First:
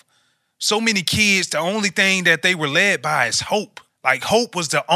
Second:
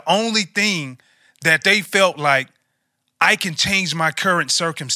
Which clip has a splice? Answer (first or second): first